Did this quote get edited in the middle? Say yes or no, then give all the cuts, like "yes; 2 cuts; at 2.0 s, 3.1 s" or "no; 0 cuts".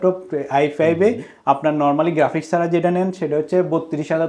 no; 0 cuts